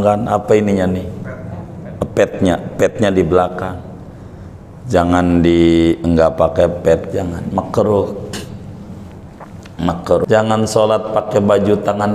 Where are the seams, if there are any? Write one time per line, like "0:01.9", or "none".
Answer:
0:10.2